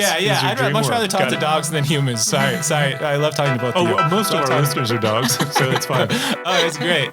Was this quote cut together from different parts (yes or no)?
no